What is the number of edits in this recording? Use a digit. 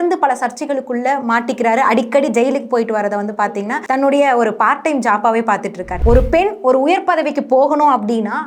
2